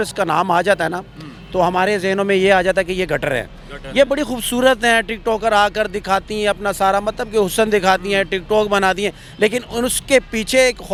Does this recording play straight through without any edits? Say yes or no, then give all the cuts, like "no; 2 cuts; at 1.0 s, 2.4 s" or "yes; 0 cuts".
yes; 0 cuts